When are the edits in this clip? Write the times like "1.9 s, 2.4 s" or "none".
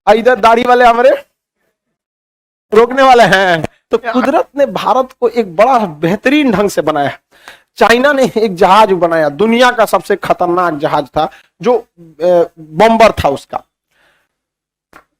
3.7 s

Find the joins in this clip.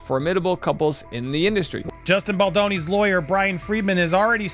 1.9 s

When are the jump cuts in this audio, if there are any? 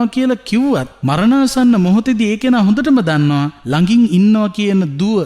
1.0 s, 3.6 s

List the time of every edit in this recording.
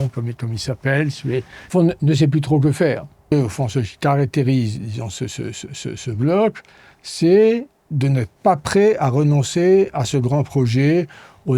1.6 s, 3.3 s

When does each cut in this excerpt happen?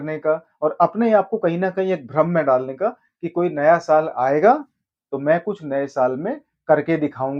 none

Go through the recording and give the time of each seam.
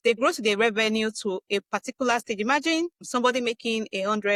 none

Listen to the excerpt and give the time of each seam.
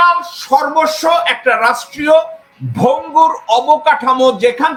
none

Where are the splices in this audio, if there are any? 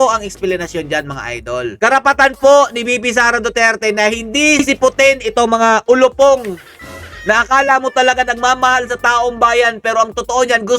none

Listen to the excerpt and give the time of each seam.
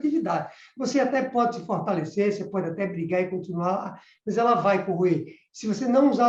none

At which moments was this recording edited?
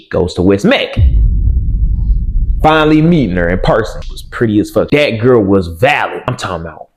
none

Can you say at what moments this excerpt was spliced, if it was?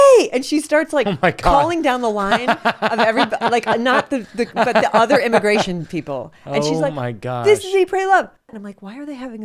8.5 s

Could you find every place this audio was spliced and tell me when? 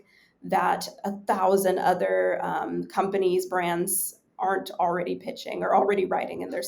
none

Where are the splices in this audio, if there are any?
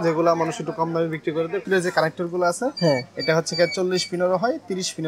1.6 s

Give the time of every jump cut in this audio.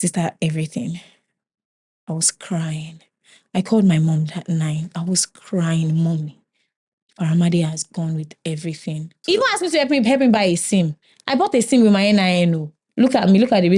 9.2 s

